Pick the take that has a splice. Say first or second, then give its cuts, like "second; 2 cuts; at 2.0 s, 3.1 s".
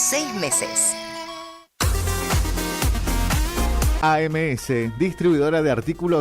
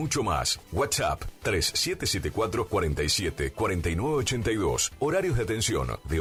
first; 1 cut; at 1.7 s